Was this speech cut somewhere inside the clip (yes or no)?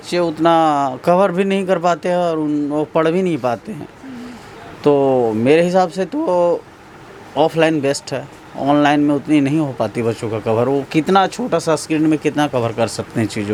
no